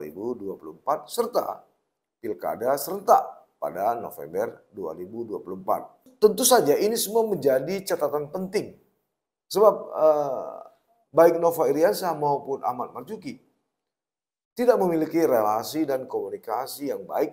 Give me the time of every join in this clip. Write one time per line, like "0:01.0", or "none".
0:06.1

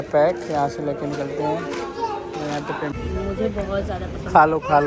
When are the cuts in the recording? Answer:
0:02.9

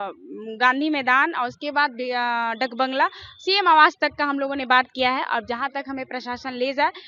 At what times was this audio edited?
none

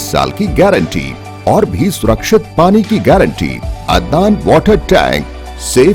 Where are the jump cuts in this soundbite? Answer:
0:03.7

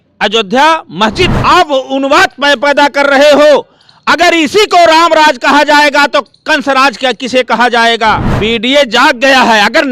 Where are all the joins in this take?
0:01.3
0:08.3

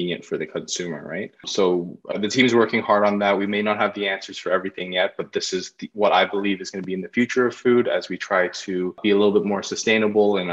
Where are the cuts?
0:01.5
0:09.0

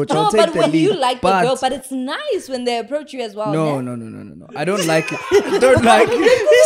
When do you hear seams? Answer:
none

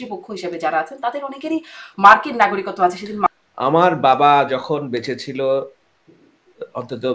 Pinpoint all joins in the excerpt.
0:03.3

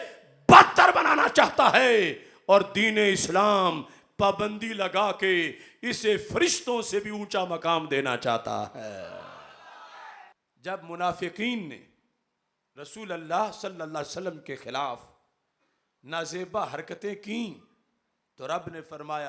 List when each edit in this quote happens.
0:10.4

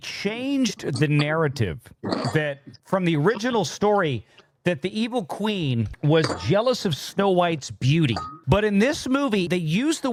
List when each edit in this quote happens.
none

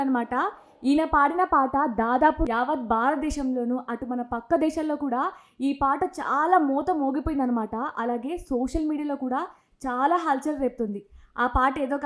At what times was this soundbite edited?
0:02.5

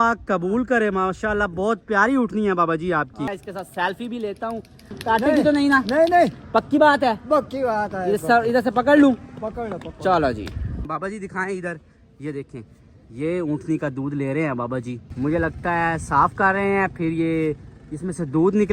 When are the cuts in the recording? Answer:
0:03.3
0:10.8
0:15.0

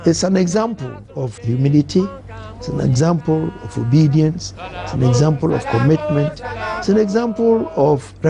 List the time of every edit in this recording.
0:01.4

